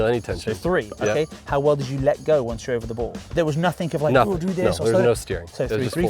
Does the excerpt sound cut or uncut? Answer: cut